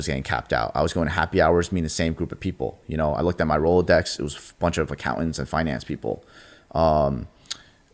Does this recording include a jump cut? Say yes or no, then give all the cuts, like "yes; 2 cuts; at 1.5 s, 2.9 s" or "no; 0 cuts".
no; 0 cuts